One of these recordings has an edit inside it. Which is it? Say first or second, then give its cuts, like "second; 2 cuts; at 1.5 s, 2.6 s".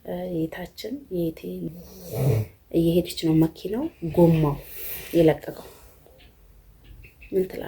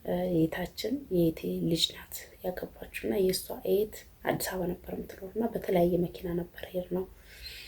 first; 1 cut; at 1.6 s